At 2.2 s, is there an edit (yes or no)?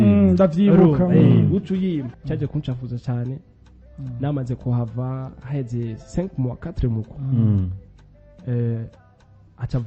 yes